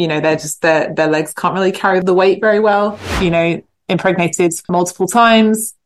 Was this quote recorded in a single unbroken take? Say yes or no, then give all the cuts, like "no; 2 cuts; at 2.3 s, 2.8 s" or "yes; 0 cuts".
no; 3 cuts; at 2.0 s, 3.0 s, 4.7 s